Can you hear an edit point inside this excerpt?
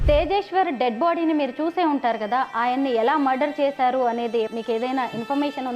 yes; 1 cut; at 4.5 s

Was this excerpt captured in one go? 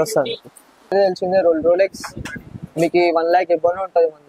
no; 1 cut; at 0.9 s

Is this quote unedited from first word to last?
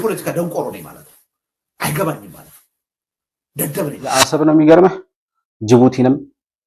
no; 1 cut; at 4.2 s

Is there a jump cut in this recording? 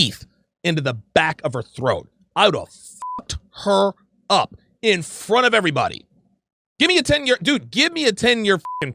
no; 0 cuts

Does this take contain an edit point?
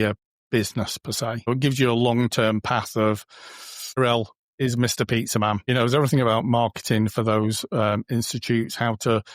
yes; 3 cuts; at 1.5 s, 4.0 s, 5.6 s

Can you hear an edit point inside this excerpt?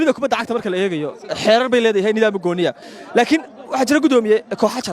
yes; 1 cut; at 2.8 s

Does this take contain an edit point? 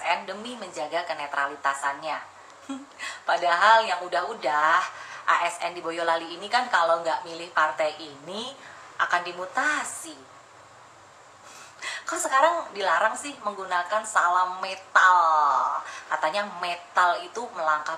no; 0 cuts

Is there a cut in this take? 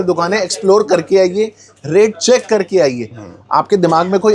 no; 0 cuts

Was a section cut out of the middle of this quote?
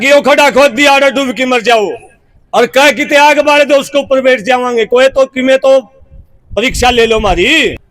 no; 0 cuts

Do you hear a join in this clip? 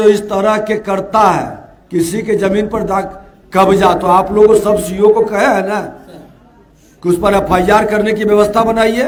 no; 0 cuts

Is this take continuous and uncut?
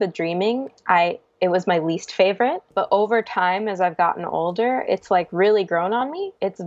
no; 1 cut; at 2.7 s

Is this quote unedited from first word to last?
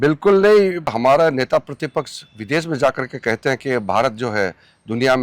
no; 1 cut; at 0.9 s

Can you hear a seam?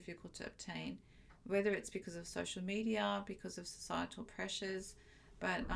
no; 0 cuts

